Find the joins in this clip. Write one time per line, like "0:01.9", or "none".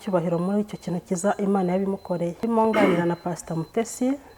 0:02.4